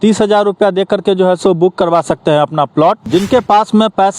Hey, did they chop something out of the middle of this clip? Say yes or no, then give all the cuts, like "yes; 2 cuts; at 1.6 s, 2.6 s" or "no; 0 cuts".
yes; 1 cut; at 3.0 s